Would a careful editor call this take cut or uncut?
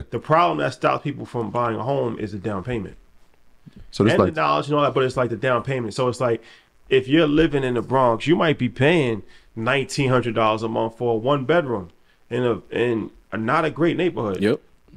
uncut